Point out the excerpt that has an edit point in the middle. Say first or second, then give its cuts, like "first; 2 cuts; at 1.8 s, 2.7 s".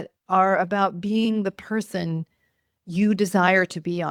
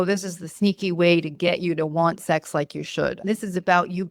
second; 1 cut; at 3.2 s